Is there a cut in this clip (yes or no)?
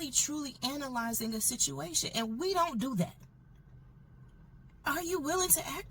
yes